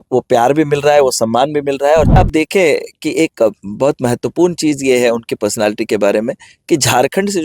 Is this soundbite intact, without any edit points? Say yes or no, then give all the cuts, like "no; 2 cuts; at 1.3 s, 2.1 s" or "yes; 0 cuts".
no; 1 cut; at 2.2 s